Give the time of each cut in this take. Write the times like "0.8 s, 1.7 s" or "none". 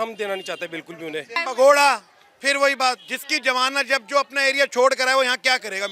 1.4 s